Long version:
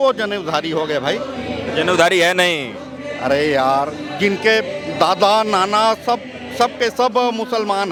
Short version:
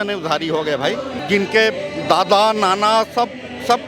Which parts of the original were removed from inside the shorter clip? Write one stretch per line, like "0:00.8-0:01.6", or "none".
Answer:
0:01.4-0:04.1